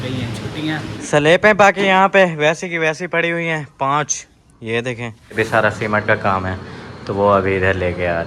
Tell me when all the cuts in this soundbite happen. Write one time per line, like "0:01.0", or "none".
0:00.9
0:05.3